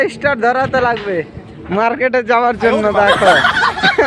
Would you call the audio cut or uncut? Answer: uncut